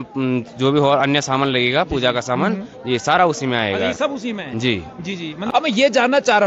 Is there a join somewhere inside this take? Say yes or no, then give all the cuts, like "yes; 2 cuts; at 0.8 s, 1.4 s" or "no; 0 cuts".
yes; 1 cut; at 5.3 s